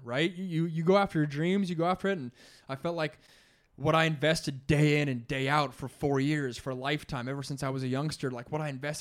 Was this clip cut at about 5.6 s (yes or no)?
no